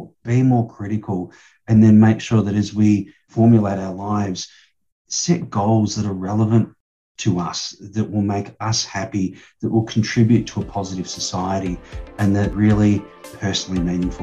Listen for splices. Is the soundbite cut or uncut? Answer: cut